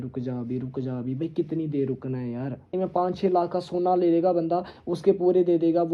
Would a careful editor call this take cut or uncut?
cut